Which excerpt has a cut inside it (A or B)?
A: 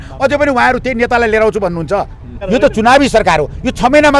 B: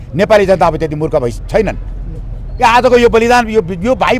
A